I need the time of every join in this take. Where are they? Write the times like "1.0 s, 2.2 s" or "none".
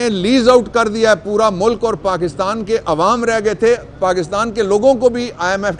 none